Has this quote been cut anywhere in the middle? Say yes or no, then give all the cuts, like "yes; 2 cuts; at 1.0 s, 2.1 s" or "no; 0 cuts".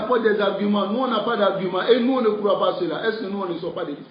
no; 0 cuts